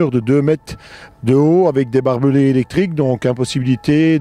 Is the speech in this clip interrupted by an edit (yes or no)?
no